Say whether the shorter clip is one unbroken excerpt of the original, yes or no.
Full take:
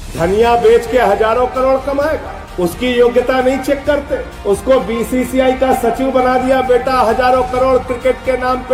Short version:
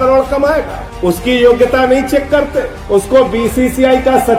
yes